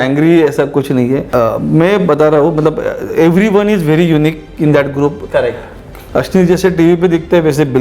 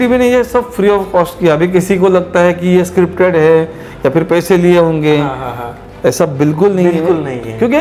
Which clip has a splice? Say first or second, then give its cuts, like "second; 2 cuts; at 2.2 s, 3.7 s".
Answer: first; 1 cut; at 1.3 s